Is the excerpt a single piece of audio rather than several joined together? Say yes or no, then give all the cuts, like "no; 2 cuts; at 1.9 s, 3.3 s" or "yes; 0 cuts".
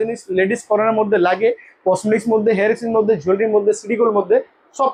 yes; 0 cuts